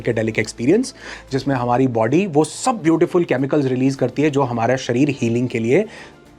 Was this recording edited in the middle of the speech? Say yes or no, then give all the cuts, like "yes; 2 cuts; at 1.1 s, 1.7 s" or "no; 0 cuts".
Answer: no; 0 cuts